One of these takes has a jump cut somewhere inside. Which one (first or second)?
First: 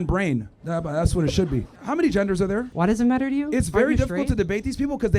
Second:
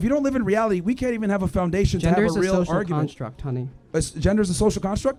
first